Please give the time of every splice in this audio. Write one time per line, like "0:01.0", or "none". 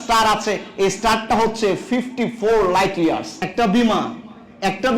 0:03.3